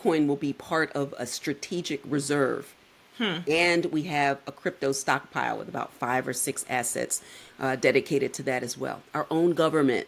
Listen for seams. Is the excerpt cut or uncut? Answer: uncut